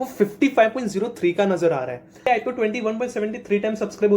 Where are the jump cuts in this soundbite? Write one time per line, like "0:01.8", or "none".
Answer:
0:02.3